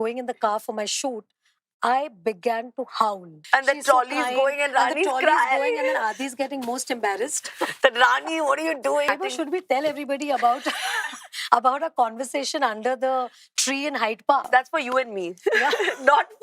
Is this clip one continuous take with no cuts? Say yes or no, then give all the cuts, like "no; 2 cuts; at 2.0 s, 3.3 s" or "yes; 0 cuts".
no; 3 cuts; at 3.3 s, 9.1 s, 14.4 s